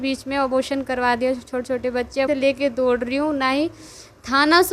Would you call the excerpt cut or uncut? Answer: cut